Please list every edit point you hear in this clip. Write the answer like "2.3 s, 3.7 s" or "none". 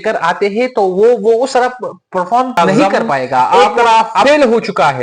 3.9 s